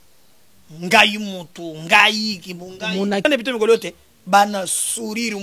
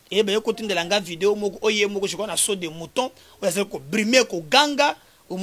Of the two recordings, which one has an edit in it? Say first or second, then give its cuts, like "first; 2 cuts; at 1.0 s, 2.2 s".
first; 1 cut; at 3.2 s